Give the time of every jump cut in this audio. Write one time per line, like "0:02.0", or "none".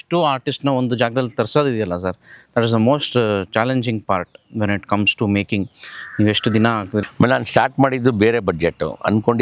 0:07.0